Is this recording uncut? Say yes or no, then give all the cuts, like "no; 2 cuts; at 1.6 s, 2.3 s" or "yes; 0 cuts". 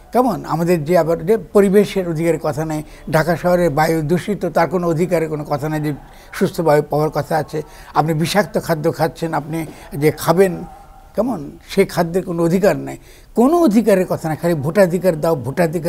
yes; 0 cuts